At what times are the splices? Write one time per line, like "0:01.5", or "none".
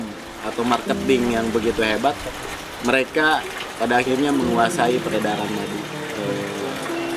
none